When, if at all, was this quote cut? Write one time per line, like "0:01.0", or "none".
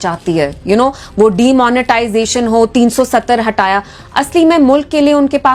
none